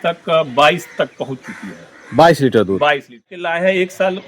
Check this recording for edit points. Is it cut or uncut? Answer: cut